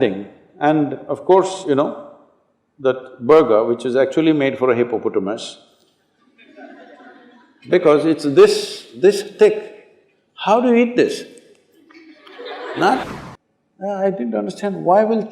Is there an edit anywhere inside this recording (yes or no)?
yes